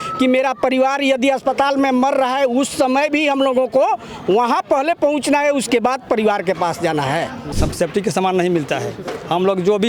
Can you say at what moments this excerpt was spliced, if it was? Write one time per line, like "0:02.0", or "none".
0:07.5